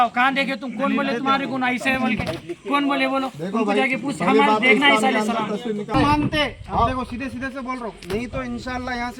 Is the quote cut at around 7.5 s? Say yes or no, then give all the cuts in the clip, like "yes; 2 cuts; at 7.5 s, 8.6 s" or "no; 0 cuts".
no; 1 cut; at 5.9 s